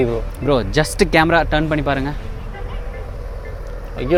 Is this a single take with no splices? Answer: yes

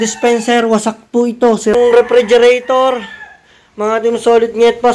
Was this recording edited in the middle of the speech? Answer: yes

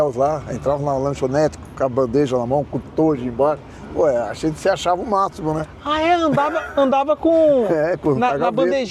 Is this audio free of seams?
yes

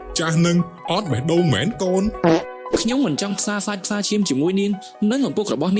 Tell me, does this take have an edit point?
yes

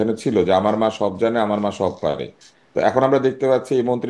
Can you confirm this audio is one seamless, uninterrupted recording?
yes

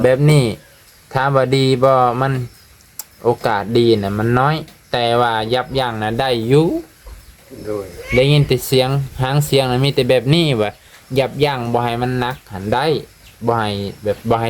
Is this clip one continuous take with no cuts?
yes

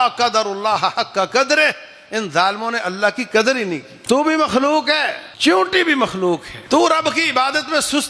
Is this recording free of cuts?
no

